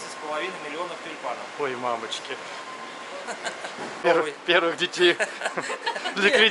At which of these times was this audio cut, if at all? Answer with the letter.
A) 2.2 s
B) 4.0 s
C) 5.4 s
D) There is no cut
B